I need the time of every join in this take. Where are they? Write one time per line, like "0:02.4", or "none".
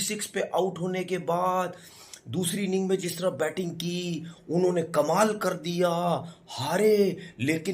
none